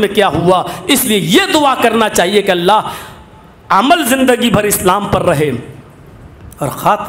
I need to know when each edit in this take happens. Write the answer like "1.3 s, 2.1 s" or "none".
none